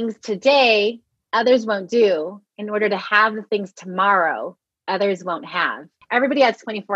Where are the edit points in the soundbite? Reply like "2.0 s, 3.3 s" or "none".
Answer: 6.0 s